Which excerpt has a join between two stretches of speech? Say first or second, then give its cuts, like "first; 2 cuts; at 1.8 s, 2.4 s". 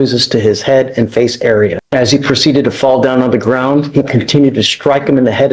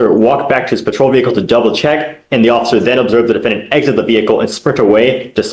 first; 1 cut; at 1.8 s